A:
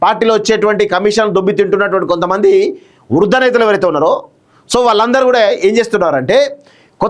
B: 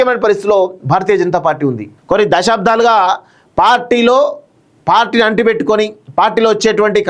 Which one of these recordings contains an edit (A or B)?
B